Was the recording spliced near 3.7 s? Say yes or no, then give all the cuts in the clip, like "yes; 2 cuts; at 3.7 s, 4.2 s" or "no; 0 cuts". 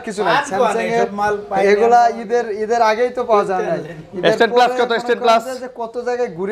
no; 0 cuts